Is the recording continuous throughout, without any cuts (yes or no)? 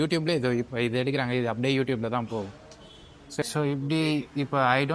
no